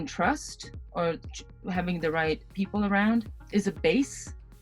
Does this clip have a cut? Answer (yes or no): yes